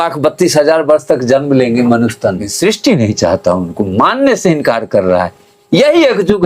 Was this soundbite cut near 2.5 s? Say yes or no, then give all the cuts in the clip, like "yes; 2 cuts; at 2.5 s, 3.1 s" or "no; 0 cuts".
yes; 1 cut; at 2.5 s